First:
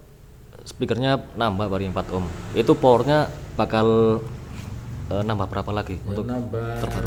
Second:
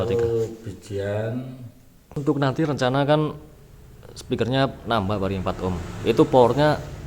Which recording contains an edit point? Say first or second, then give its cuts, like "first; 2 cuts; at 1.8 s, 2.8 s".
second; 1 cut; at 2.2 s